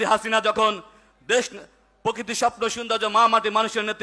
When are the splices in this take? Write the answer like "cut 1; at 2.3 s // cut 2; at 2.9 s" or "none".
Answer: none